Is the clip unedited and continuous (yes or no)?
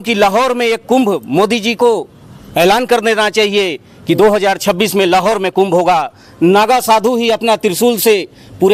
yes